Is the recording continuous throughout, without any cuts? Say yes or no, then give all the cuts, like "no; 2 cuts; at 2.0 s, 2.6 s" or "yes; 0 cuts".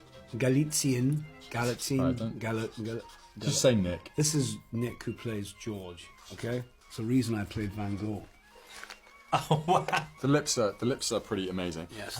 no; 1 cut; at 10.1 s